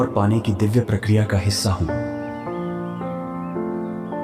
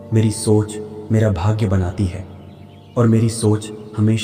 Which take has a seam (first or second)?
first